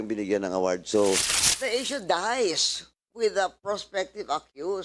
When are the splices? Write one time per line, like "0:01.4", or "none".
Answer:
0:01.3